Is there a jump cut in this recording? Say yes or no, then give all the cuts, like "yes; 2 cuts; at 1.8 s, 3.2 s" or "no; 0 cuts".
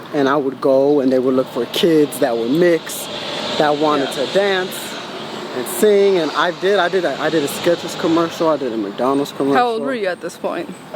no; 0 cuts